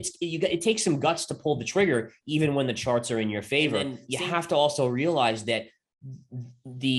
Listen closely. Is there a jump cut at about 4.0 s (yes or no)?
yes